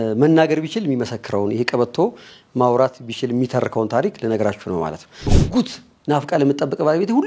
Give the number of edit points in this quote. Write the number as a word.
one